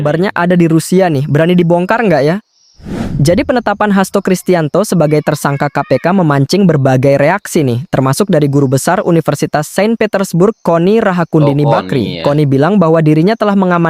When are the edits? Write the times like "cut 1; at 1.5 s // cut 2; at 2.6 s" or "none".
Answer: none